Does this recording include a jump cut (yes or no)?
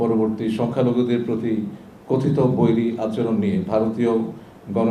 no